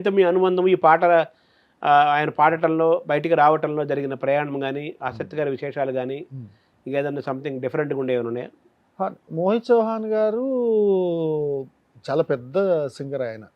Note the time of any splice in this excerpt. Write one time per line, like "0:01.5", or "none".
none